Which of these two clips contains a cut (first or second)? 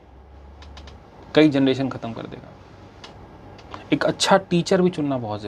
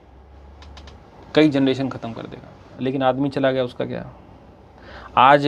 second